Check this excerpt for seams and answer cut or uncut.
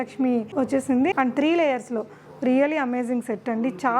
cut